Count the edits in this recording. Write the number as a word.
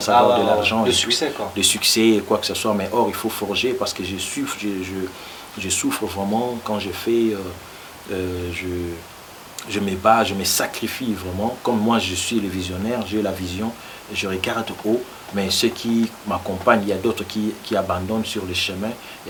zero